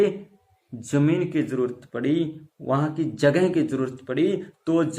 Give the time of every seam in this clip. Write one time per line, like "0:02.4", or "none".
none